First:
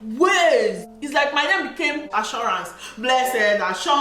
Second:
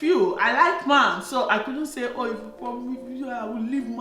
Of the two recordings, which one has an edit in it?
first; 2 cuts; at 0.9 s, 2.1 s

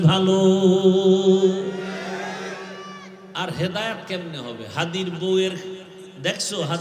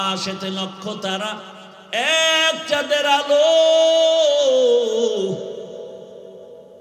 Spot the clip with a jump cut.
first; 1 cut; at 3.2 s

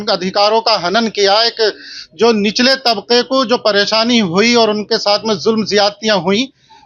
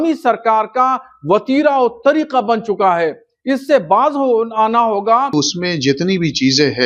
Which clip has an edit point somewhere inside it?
second; 1 cut; at 5.3 s

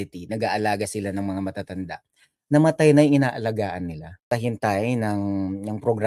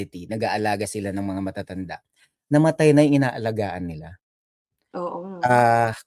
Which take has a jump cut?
first; 1 cut; at 4.3 s

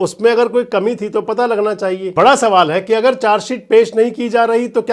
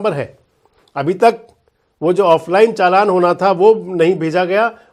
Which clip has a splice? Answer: first; 1 cut; at 2.1 s

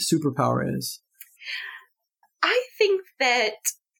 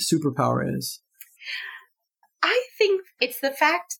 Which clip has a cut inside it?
second; 1 cut; at 3.1 s

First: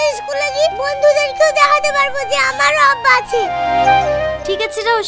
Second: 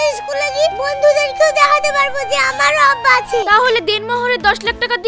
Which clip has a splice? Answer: second; 1 cut; at 3.4 s

